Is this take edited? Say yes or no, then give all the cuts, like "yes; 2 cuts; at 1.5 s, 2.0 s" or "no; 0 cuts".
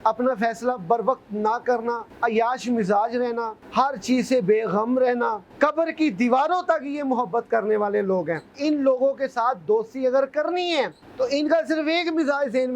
yes; 5 cuts; at 2.1 s, 3.6 s, 5.4 s, 8.5 s, 11.0 s